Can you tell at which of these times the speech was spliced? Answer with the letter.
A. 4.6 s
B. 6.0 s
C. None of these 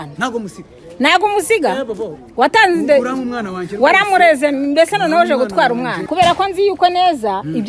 B